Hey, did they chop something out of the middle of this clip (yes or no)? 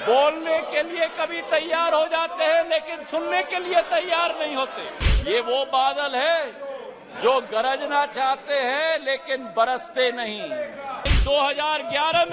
yes